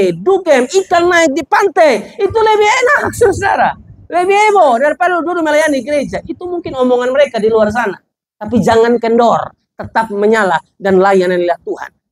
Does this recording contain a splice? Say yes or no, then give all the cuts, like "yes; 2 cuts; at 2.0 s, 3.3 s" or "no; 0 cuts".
no; 0 cuts